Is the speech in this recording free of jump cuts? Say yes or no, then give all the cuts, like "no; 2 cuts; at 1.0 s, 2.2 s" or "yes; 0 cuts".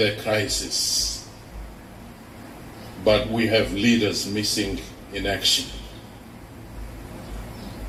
yes; 0 cuts